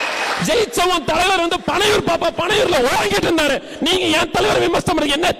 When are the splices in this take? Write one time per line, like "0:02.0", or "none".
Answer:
none